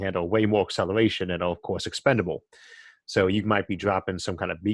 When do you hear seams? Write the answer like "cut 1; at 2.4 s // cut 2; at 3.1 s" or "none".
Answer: none

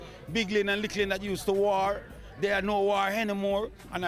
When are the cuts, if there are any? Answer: none

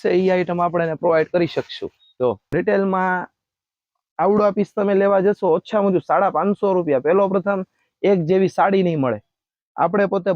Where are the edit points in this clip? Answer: cut 1; at 2.4 s

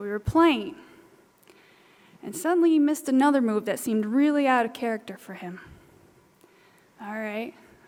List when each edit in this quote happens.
none

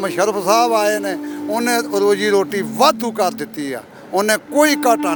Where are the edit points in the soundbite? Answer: none

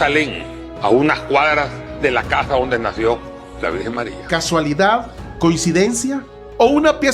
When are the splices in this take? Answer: cut 1; at 4.2 s

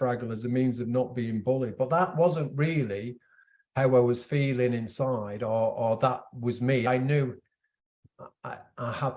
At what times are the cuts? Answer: cut 1; at 6.9 s

